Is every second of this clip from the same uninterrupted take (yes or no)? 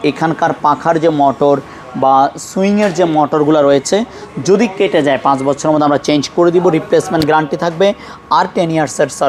yes